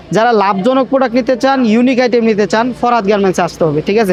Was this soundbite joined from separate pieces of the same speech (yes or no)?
no